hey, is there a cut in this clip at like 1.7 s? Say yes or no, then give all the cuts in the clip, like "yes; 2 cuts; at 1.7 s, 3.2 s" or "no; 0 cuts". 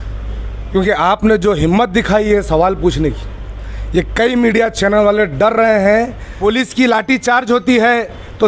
no; 1 cut; at 6.2 s